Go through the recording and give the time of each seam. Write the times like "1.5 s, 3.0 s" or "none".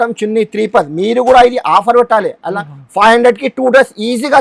none